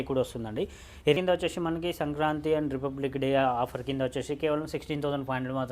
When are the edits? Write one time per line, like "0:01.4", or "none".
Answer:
0:01.2